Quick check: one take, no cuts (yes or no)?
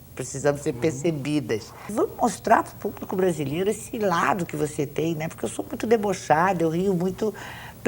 no